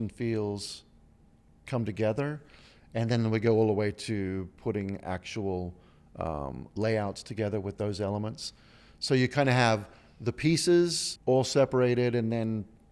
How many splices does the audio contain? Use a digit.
1